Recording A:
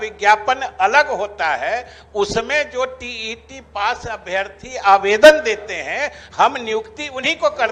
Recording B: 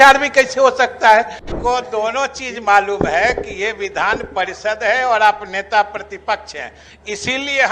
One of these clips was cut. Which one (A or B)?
B